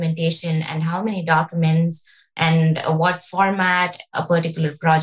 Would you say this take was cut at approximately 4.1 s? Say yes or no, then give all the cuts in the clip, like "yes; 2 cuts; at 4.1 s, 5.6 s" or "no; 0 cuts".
yes; 1 cut; at 4.1 s